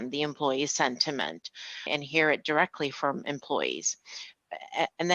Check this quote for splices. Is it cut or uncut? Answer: uncut